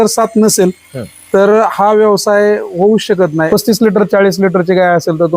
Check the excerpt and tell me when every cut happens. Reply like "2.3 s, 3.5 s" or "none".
3.5 s